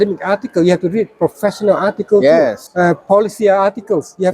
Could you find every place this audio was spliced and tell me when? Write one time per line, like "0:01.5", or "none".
0:02.6